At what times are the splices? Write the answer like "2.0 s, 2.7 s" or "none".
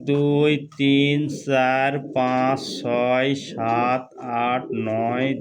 none